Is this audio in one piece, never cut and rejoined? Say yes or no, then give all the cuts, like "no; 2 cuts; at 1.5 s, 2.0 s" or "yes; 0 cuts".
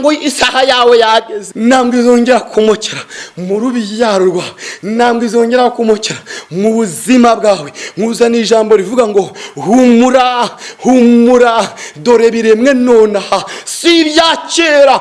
no; 1 cut; at 1.4 s